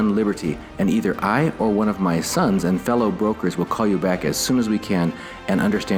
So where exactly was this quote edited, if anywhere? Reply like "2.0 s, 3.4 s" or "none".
none